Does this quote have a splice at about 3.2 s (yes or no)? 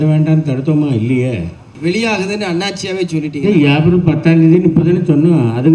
no